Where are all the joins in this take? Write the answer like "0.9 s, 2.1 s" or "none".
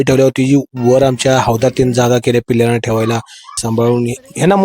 3.6 s